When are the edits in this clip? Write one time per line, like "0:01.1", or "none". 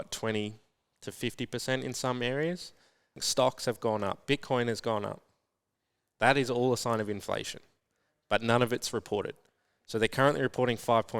0:03.2